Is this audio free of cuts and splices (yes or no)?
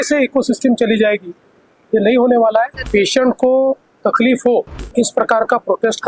no